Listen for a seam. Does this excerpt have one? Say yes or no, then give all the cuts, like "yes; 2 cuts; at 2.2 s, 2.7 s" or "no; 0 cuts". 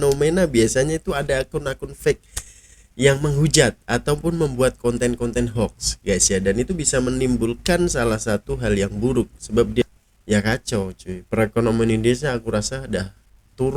yes; 1 cut; at 9.8 s